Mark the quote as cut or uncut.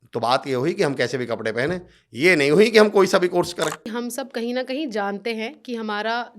cut